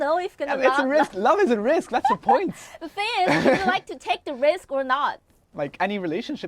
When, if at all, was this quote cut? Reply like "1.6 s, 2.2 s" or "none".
5.5 s